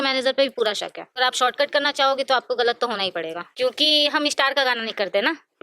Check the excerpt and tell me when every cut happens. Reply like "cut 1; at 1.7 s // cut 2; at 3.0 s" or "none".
cut 1; at 1.2 s // cut 2; at 3.4 s